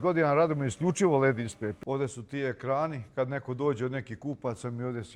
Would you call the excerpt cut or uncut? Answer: cut